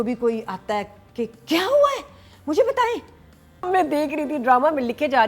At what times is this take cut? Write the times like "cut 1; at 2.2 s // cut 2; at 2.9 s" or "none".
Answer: cut 1; at 3.7 s